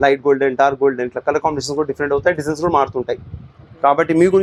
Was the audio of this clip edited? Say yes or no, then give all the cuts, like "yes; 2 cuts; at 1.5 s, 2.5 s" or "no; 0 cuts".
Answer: no; 0 cuts